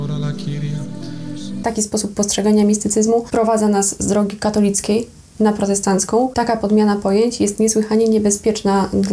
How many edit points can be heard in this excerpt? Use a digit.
3